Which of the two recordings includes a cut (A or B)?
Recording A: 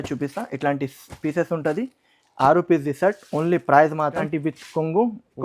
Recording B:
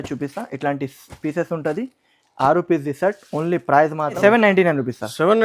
A